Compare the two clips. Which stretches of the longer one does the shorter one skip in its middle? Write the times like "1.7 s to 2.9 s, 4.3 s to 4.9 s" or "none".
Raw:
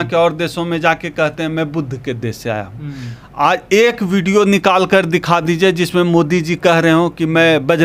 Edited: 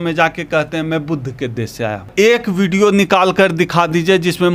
2.8 s to 3.6 s